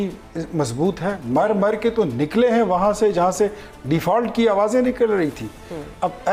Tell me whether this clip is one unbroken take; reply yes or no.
yes